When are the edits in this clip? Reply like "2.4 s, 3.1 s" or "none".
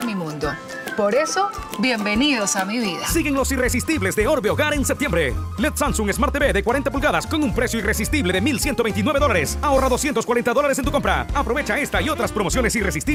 none